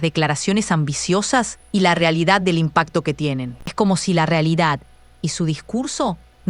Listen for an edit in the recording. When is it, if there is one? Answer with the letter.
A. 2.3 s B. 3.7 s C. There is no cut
B